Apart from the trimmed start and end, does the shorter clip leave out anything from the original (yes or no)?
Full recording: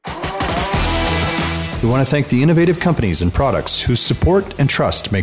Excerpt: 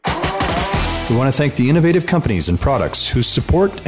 yes